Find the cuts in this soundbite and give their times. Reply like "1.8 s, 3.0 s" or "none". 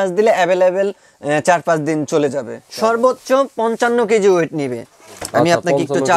2.6 s